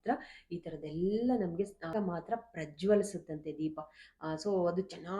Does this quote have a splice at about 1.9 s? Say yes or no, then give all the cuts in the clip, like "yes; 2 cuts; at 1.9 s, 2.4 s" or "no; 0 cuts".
yes; 1 cut; at 1.9 s